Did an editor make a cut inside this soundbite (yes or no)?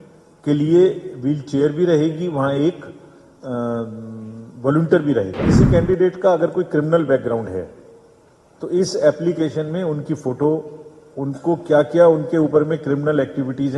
yes